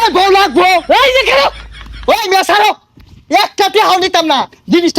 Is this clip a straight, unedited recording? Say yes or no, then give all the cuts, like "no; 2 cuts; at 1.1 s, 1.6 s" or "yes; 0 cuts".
no; 1 cut; at 1.6 s